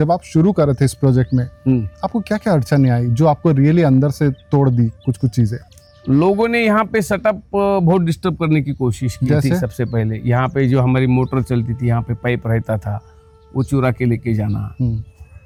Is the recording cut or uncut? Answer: uncut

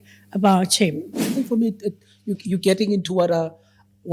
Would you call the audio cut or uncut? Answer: cut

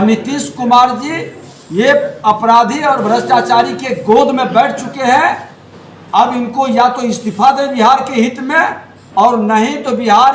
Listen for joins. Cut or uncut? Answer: uncut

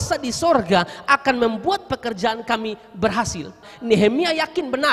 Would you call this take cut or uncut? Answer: cut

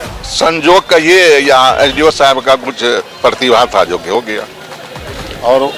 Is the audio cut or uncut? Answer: uncut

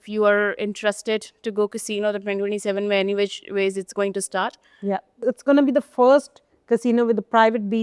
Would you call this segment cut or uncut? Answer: uncut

